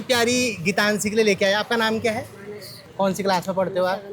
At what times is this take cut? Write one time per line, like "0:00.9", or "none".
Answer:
none